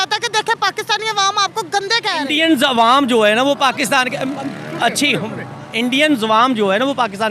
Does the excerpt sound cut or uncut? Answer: cut